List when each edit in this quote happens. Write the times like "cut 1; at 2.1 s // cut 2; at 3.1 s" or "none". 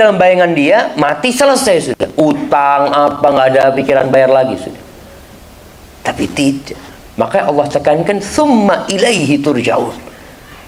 none